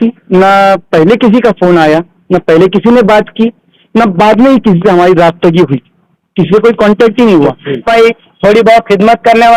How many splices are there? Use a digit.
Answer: 1